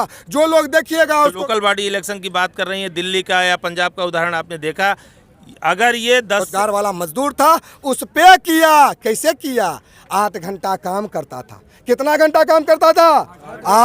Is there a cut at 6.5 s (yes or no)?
yes